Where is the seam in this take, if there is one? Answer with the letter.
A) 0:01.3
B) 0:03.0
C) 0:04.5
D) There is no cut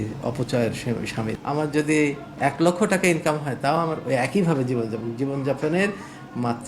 A